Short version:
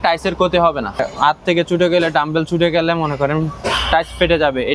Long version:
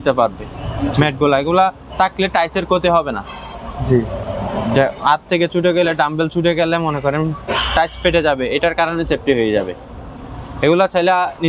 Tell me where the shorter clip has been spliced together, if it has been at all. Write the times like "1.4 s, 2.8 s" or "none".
1.1 s